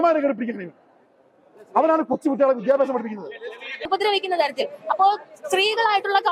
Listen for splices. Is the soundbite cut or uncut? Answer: cut